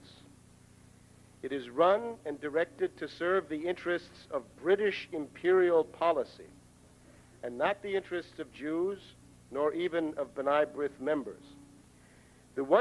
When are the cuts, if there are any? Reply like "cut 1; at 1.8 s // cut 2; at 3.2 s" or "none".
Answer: cut 1; at 10.8 s